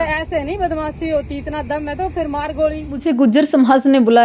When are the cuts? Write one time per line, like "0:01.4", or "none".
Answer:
0:03.0